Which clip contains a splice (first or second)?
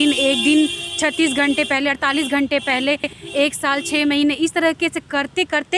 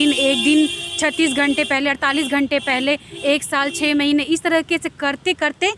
second